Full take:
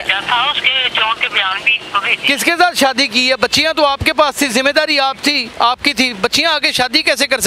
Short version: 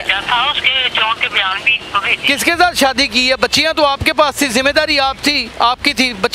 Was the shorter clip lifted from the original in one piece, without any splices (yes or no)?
yes